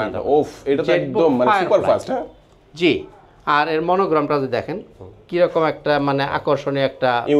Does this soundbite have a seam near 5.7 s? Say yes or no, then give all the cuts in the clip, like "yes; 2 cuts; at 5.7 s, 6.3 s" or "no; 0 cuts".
no; 0 cuts